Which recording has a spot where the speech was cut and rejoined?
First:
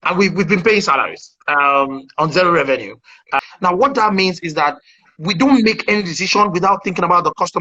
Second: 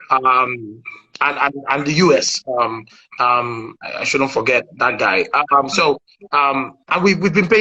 first; 1 cut; at 3.3 s

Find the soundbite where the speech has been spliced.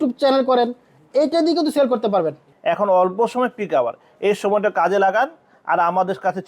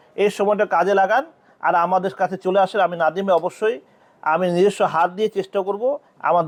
first; 1 cut; at 2.5 s

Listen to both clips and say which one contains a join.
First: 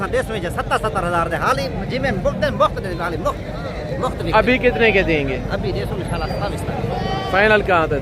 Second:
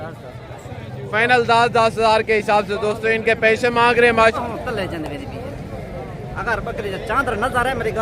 second; 1 cut; at 4.3 s

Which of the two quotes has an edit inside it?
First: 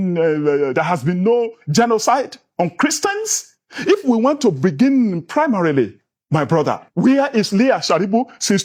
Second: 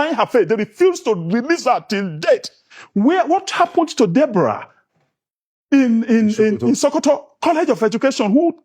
second; 1 cut; at 2.6 s

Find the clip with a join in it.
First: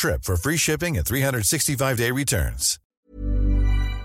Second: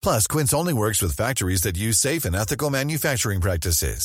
first; 1 cut; at 2.8 s

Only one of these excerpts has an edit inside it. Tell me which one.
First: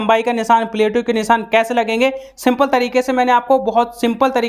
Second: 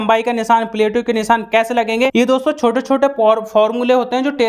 second; 1 cut; at 2.1 s

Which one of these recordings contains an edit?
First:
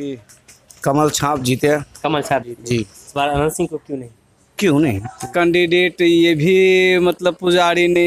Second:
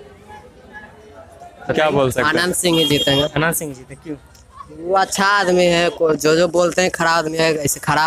first; 2 cuts; at 3.0 s, 5.3 s

